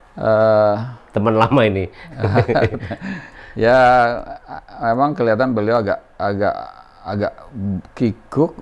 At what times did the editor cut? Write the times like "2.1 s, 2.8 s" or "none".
none